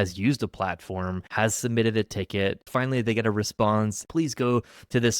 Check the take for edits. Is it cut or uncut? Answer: cut